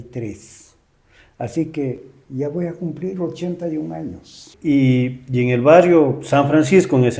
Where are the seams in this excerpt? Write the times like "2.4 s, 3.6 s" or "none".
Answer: 4.5 s

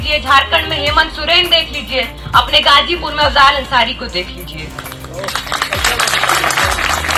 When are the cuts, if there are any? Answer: none

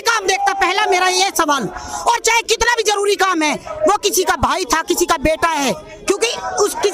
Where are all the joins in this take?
none

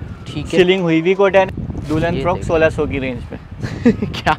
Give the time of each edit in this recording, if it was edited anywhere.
1.5 s

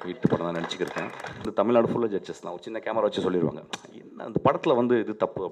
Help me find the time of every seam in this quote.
1.5 s

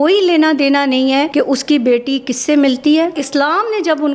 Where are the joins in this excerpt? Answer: 1.3 s, 3.2 s

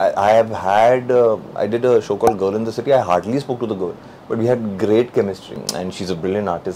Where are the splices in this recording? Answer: 5.6 s

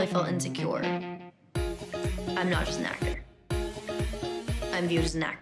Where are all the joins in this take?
none

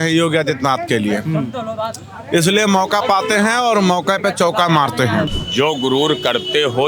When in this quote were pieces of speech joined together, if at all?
5.4 s

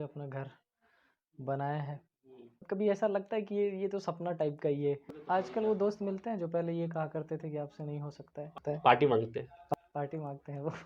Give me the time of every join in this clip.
2.6 s, 5.2 s

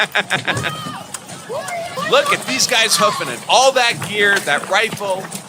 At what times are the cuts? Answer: 1.9 s

